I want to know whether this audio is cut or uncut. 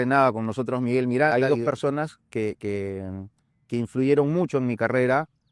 cut